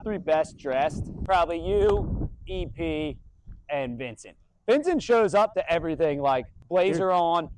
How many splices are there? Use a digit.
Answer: 2